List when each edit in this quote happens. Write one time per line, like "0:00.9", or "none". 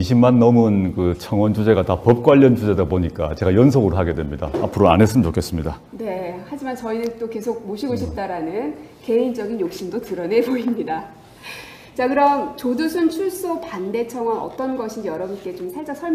none

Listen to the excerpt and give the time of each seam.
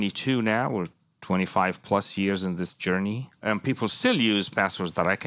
0:03.4

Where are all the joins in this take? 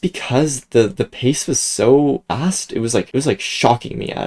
none

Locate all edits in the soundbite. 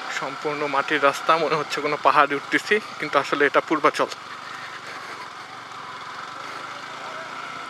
none

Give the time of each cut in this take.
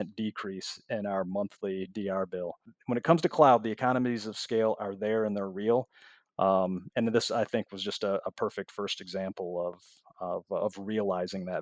0:02.7

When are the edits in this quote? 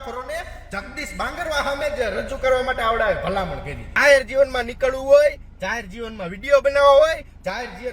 0:04.0

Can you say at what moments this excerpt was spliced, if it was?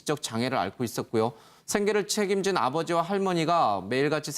0:02.1

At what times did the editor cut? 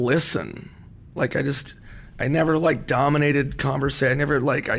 none

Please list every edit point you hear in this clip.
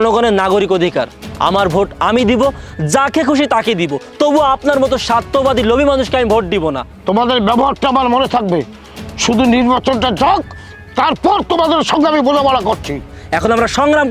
0:06.9
0:13.1

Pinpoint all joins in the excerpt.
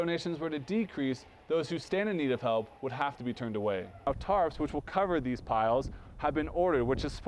0:04.0

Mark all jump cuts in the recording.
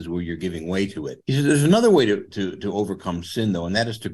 0:01.1

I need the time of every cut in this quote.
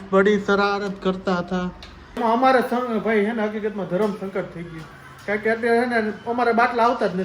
0:02.2

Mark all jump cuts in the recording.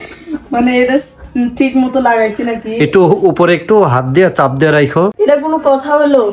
0:05.1

